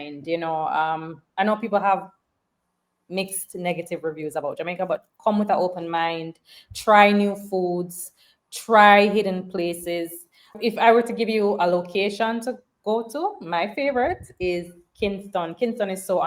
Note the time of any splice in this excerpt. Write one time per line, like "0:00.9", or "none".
0:10.5